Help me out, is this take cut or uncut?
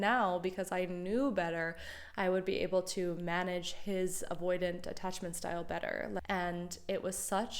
cut